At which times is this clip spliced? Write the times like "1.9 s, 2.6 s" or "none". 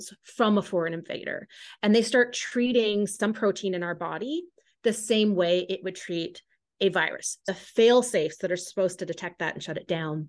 7.4 s